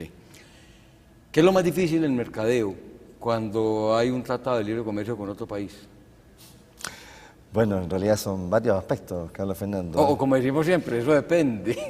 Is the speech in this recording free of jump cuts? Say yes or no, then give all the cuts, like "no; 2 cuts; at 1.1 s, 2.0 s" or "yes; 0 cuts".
no; 1 cut; at 7.3 s